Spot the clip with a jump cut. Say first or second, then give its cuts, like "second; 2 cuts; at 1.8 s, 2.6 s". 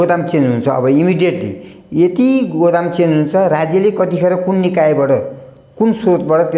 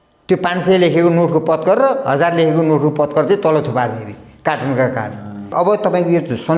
second; 1 cut; at 5.5 s